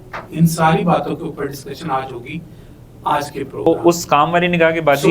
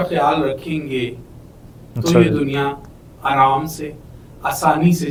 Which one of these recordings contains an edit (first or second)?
first